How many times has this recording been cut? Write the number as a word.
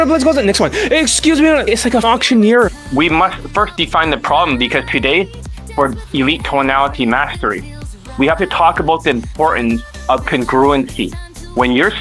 one